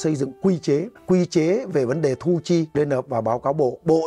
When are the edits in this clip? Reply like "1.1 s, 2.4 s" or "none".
0.9 s, 2.7 s